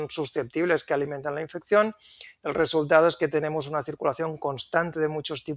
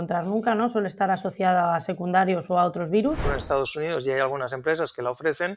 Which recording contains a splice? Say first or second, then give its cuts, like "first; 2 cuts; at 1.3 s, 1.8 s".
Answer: second; 1 cut; at 3.3 s